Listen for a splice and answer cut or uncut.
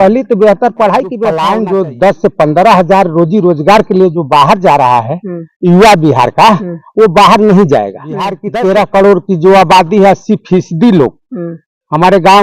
cut